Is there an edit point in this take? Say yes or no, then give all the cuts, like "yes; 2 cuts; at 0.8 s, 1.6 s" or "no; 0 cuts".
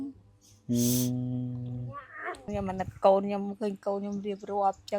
yes; 1 cut; at 2.4 s